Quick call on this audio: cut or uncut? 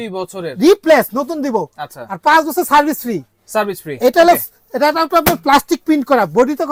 uncut